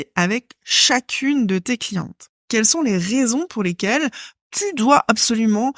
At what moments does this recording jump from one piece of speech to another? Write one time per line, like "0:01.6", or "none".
0:02.3